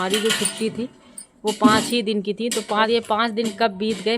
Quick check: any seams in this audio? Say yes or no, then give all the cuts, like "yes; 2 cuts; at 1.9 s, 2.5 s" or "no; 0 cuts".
yes; 1 cut; at 2.9 s